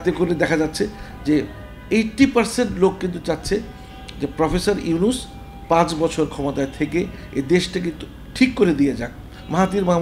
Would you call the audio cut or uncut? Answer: uncut